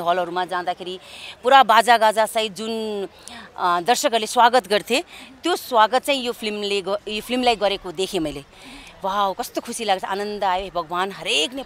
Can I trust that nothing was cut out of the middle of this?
yes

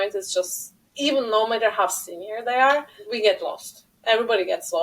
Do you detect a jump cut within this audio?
yes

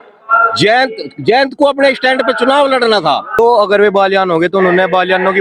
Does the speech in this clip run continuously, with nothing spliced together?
no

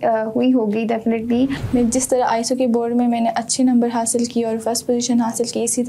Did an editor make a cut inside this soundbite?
yes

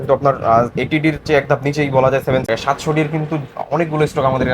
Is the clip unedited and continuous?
no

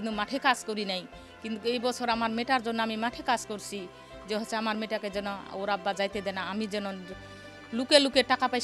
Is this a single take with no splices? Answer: yes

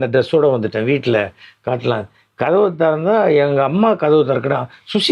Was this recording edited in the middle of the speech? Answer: no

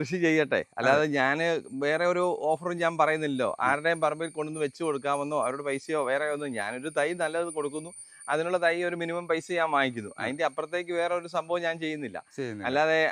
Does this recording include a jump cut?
no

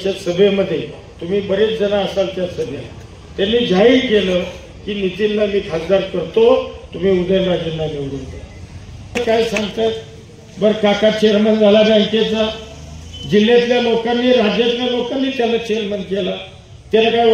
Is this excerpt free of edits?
no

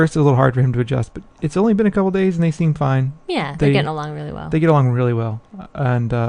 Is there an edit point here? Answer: no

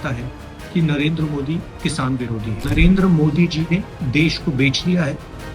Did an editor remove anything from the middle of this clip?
yes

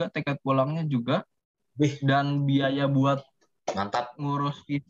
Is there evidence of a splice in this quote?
no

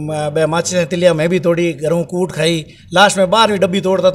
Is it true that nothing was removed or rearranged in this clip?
yes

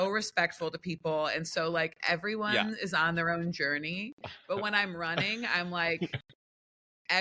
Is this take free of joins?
yes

